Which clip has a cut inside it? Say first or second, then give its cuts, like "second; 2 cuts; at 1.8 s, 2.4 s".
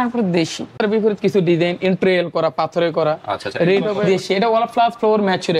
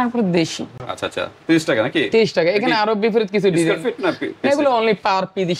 first; 2 cuts; at 0.8 s, 4.0 s